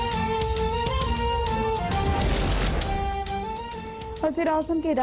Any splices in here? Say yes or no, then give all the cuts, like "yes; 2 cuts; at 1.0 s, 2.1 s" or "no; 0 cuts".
no; 0 cuts